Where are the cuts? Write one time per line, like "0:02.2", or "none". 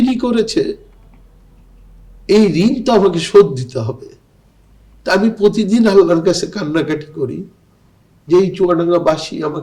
none